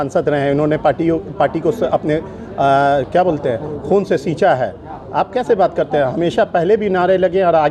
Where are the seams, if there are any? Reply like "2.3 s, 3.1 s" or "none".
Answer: none